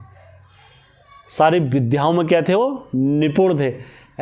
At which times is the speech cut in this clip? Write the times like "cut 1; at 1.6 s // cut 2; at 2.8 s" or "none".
none